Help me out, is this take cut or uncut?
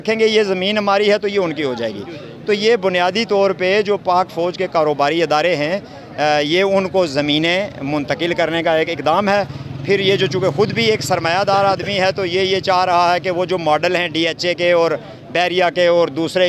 uncut